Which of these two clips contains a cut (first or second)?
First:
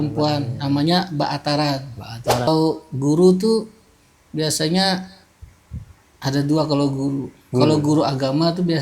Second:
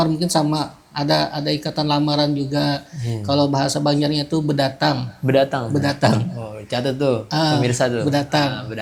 first